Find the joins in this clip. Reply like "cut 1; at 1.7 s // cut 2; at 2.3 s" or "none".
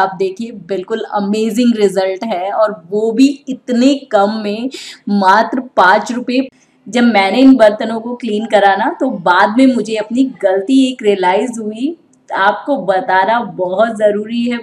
cut 1; at 6.5 s